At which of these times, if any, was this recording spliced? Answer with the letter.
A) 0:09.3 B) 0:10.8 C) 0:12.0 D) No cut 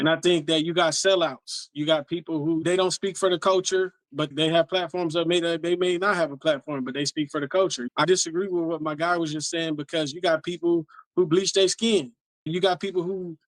D